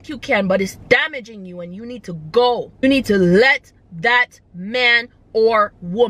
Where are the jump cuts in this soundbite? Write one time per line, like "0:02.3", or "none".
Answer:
0:02.8